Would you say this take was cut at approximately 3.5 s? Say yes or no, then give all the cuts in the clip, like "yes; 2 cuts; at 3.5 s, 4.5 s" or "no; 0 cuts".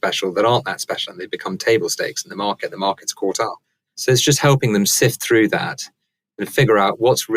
yes; 1 cut; at 3.5 s